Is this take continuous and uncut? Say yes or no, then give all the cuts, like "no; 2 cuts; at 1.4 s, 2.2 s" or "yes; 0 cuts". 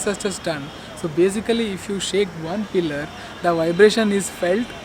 yes; 0 cuts